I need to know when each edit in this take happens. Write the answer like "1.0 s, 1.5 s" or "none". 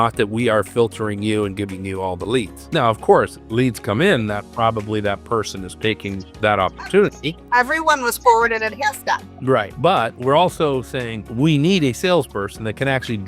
none

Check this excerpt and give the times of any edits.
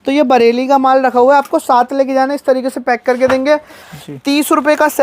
3.8 s

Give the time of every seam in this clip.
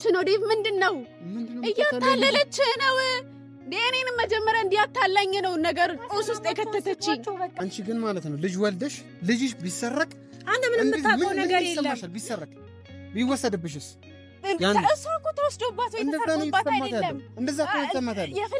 7.6 s

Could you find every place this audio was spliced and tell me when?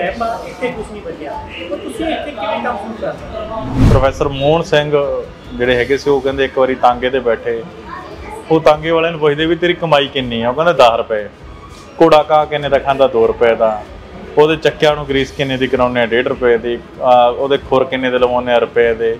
3.9 s

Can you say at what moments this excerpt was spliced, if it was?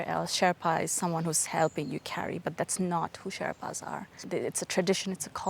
4.2 s

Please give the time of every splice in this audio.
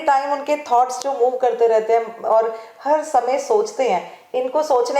none

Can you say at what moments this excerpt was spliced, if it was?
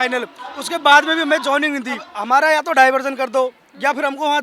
2.1 s

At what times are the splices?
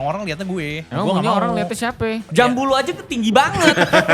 0.8 s, 2.2 s

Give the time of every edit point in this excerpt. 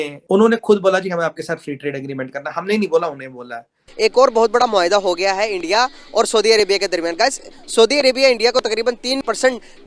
3.8 s

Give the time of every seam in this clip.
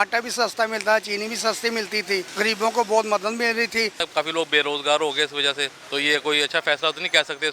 2.3 s, 4.0 s, 5.7 s

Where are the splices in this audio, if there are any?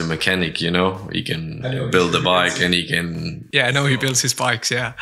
none

